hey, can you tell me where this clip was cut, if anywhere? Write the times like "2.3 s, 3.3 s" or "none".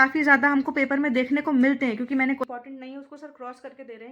2.4 s